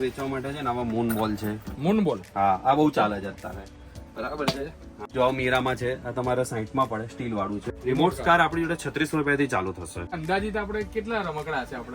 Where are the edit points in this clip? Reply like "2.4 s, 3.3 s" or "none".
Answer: 5.1 s, 7.8 s, 10.1 s

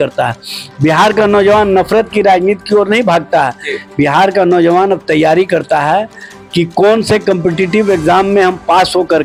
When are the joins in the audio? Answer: none

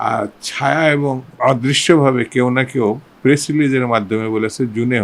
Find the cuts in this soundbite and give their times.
1.3 s

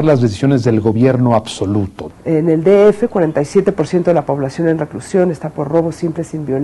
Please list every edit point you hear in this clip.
2.0 s

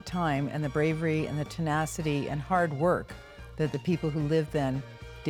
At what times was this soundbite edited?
none

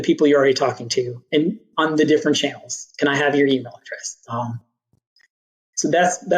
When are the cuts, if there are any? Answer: none

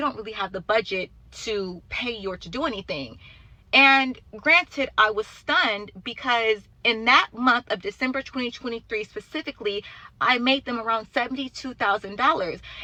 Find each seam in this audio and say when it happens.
none

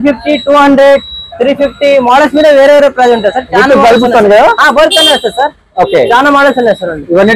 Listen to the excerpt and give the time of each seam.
none

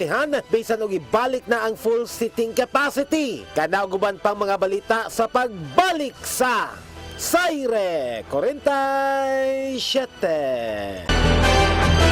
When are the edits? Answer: none

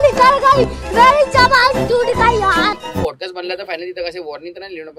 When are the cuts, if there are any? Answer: 2.8 s

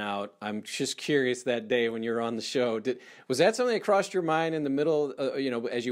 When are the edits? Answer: none

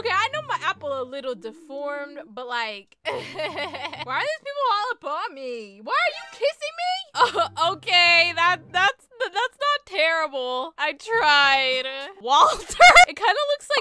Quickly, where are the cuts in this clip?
7.1 s

